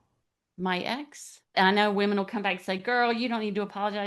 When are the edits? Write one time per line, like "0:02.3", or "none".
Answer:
0:01.5